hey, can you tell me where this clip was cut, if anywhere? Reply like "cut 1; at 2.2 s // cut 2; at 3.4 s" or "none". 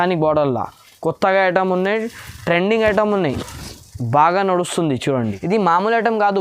cut 1; at 5.3 s